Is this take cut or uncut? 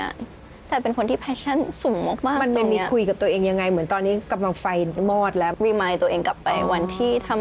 cut